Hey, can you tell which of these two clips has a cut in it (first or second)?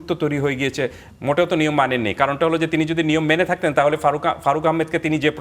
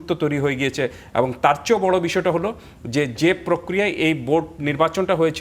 first